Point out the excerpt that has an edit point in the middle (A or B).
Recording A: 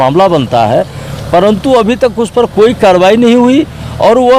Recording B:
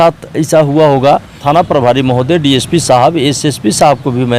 B